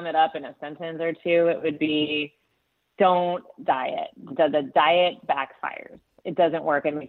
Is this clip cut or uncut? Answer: uncut